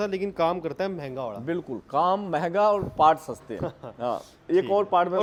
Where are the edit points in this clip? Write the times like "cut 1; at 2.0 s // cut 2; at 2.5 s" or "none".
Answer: none